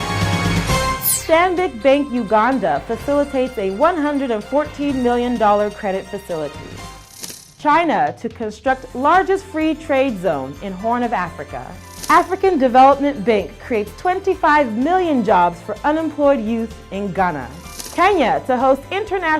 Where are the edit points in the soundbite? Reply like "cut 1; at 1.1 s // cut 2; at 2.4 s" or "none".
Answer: cut 1; at 1.1 s